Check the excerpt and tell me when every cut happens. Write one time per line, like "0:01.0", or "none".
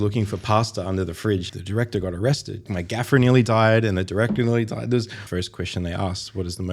0:01.5
0:02.7
0:05.2